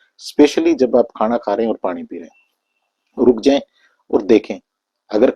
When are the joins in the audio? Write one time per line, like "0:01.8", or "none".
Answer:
none